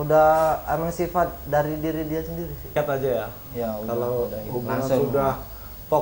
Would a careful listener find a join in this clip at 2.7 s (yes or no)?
yes